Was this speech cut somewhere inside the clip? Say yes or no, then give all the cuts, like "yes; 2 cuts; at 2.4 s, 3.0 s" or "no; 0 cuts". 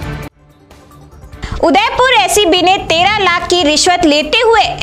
no; 0 cuts